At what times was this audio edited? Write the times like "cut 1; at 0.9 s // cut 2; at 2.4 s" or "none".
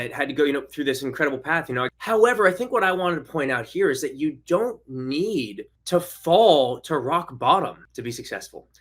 cut 1; at 1.9 s // cut 2; at 7.8 s